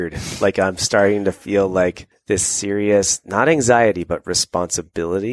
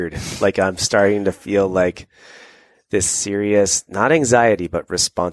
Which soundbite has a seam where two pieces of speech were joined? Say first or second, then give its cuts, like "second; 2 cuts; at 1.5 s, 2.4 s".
first; 1 cut; at 2.1 s